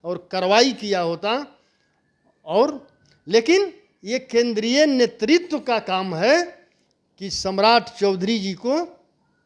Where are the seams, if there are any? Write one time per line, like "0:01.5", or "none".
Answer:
none